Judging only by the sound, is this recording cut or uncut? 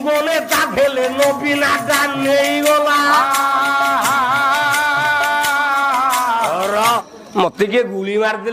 cut